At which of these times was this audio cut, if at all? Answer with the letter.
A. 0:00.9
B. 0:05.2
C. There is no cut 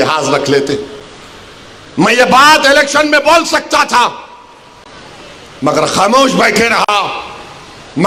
C